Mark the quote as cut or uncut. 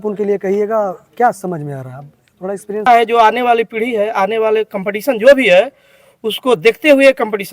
cut